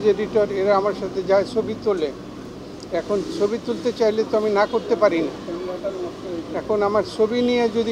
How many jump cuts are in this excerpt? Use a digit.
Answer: 0